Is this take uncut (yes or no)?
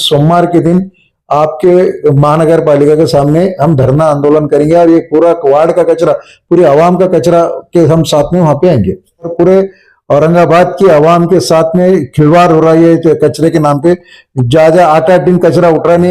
no